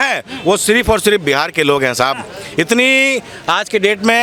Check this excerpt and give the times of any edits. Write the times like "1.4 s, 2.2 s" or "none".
none